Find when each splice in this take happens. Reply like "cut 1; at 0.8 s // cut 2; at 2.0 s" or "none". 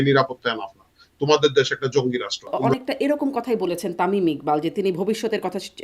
cut 1; at 2.6 s